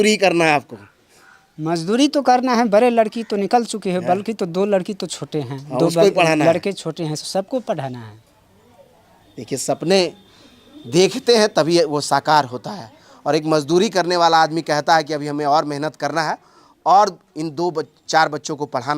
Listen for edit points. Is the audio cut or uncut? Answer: uncut